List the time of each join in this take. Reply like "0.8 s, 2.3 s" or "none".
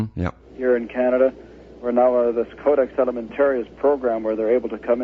2.1 s